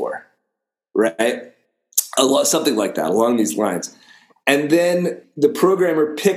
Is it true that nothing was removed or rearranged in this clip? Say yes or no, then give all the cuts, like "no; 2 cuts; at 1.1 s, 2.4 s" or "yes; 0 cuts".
no; 1 cut; at 5.2 s